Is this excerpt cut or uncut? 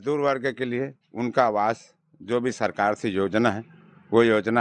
uncut